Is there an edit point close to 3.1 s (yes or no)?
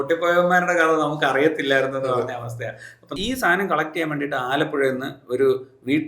yes